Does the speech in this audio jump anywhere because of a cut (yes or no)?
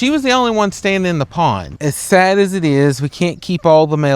yes